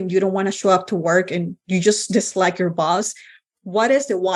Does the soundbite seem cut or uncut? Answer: uncut